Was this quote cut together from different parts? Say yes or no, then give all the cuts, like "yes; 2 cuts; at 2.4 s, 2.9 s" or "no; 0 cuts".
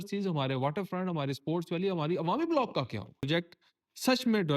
yes; 1 cut; at 3.3 s